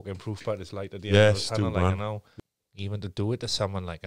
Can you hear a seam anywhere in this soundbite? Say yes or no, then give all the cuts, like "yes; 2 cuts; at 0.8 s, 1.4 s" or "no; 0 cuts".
yes; 1 cut; at 2.3 s